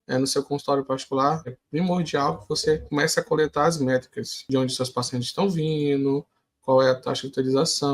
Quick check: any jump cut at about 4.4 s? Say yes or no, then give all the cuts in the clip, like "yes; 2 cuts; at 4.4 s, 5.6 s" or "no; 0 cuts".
yes; 3 cuts; at 1.6 s, 2.8 s, 4.4 s